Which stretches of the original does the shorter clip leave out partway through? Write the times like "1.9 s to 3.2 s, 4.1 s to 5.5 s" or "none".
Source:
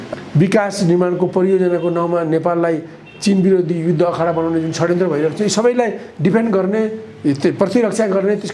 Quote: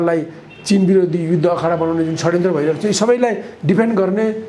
none